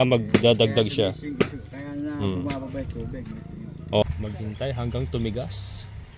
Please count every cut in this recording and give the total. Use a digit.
1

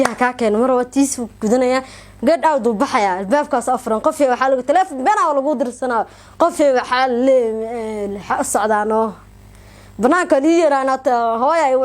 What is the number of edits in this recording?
0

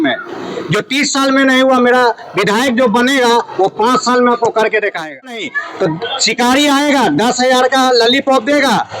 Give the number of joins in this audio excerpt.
1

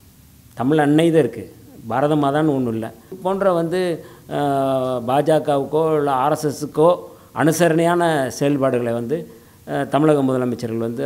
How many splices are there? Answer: 1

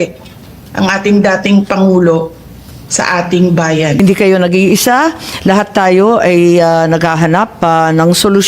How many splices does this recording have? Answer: 1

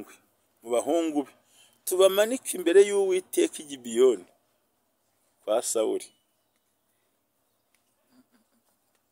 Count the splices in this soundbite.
0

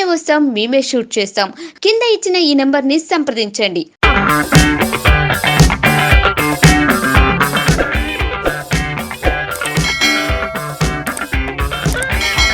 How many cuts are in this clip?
0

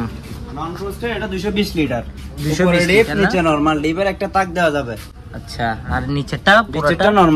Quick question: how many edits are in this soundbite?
0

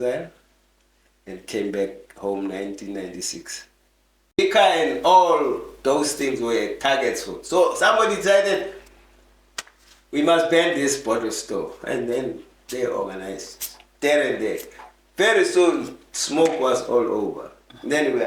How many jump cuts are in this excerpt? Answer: 1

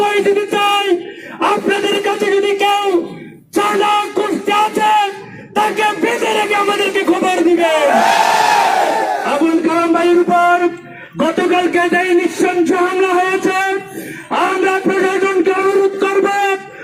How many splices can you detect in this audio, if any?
0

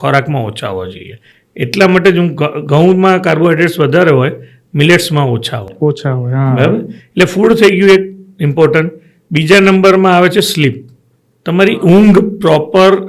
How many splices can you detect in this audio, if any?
0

